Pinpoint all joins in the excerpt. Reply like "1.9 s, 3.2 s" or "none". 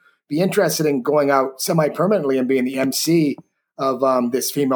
none